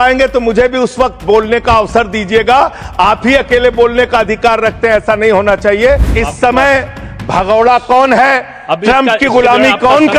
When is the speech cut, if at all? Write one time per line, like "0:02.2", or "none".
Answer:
0:06.1